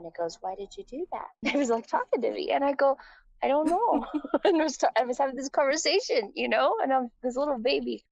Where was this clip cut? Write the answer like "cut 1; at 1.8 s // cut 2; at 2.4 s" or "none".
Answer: cut 1; at 1.4 s